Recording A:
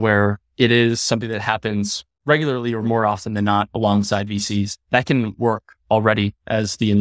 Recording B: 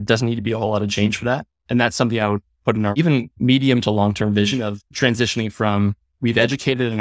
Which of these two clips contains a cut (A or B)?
B